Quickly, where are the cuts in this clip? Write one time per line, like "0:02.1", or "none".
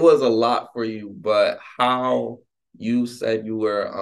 none